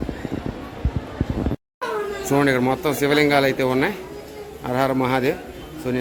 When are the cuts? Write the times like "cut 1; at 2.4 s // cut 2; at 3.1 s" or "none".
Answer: cut 1; at 1.8 s